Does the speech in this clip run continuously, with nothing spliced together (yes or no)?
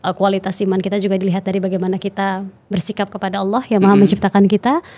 yes